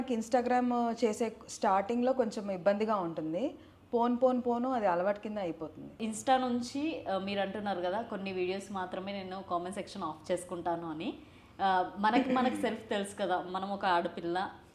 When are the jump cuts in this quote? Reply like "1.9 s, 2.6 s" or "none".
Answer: 6.0 s